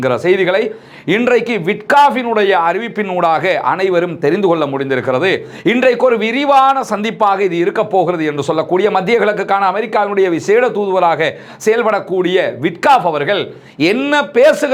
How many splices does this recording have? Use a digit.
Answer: 0